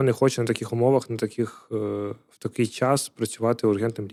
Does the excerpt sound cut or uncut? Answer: uncut